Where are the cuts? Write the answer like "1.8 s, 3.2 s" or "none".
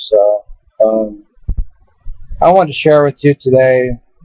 1.1 s